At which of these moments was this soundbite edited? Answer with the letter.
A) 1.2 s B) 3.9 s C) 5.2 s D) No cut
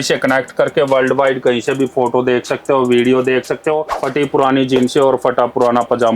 B